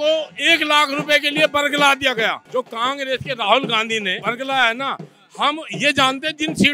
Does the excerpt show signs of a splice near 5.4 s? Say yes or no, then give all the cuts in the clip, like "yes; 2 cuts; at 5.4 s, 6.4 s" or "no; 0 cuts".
no; 2 cuts; at 2.4 s, 4.1 s